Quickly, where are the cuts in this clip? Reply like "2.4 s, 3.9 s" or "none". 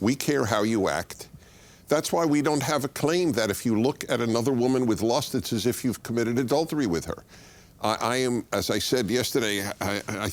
none